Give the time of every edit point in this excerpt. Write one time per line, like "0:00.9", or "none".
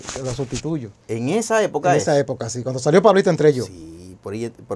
none